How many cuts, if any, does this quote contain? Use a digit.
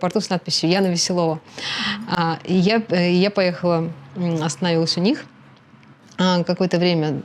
0